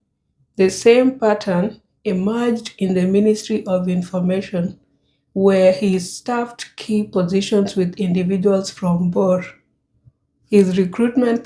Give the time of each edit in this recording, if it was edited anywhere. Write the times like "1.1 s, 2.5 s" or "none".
none